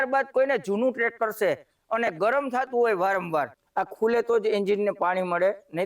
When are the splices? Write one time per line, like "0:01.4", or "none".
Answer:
0:03.6